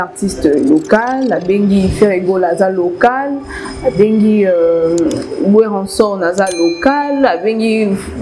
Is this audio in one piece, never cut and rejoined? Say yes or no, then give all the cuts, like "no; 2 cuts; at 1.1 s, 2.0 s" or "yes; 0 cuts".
yes; 0 cuts